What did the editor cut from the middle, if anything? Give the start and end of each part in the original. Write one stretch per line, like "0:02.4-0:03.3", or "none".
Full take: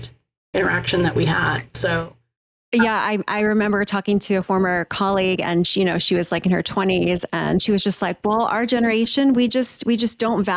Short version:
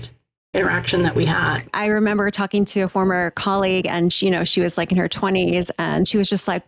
0:01.7-0:03.3